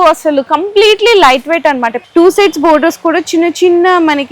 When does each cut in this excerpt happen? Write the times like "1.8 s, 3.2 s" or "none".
2.0 s